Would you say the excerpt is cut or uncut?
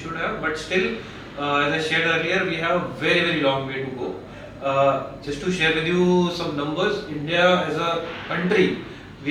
uncut